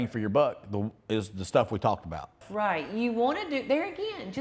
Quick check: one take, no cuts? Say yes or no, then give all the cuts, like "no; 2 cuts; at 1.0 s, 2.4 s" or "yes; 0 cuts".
no; 1 cut; at 2.4 s